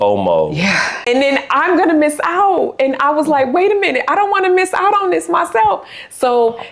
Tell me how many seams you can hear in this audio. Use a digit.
1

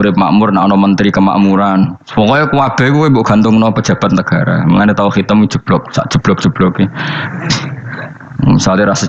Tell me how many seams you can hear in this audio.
1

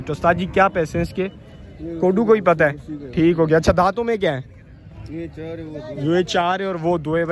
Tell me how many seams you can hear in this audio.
0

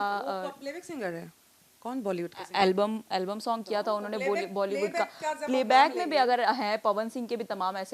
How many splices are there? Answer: 0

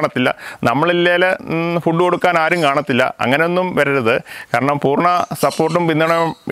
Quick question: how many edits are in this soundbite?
0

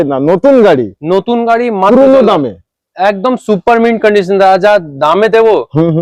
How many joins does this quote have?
0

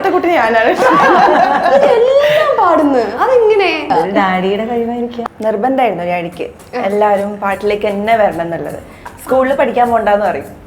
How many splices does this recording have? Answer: 2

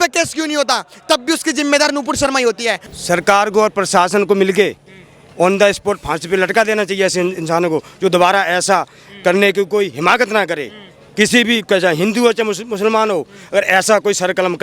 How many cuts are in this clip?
1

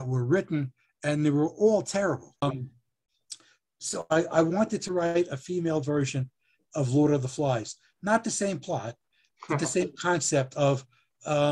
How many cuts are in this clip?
1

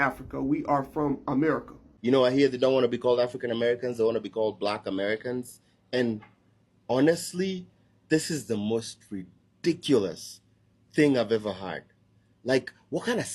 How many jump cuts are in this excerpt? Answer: 1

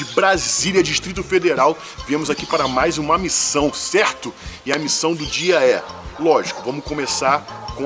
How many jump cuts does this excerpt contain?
0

